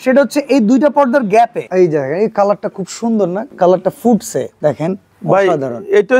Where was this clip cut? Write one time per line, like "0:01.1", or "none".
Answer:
0:01.6
0:03.4
0:04.5